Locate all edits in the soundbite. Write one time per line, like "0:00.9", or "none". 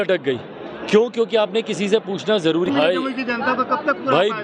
0:02.7